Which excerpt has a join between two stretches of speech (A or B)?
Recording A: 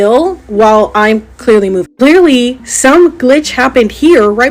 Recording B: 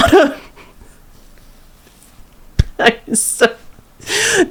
A